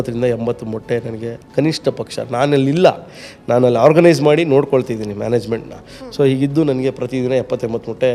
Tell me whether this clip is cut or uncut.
uncut